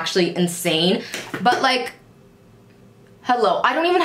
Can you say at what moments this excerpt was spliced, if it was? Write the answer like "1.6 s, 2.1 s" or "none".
1.1 s

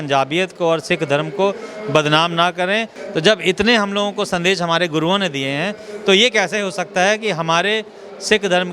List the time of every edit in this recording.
3.0 s

